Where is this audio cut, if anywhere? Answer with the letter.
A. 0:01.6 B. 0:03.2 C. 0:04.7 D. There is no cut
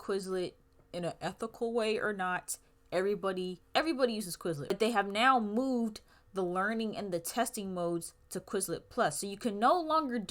C